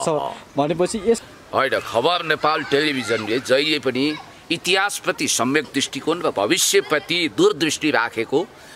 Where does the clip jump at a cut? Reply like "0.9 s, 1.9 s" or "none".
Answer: 1.2 s